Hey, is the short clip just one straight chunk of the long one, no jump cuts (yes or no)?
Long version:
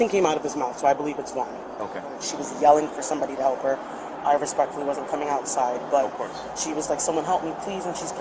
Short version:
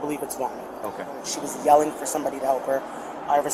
yes